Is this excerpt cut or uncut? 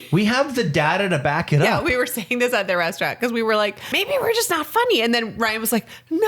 cut